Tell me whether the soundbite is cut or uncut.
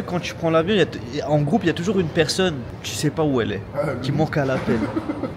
uncut